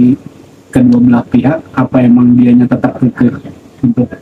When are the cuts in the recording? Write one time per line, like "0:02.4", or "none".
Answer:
none

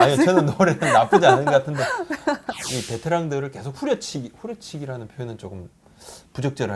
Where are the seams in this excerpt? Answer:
0:02.5

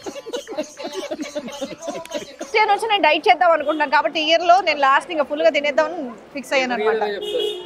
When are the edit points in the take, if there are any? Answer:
0:02.5

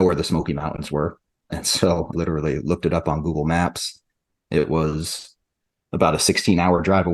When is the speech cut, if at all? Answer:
0:02.1

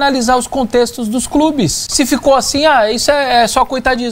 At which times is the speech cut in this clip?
0:01.8

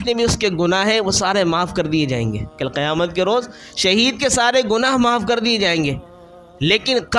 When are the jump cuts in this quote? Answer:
0:02.5

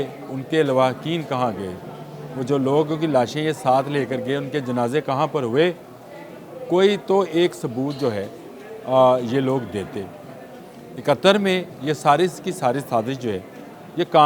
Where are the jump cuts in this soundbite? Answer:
none

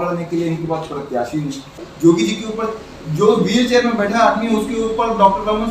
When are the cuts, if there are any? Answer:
0:01.9

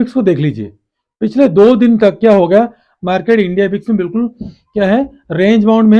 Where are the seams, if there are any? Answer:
none

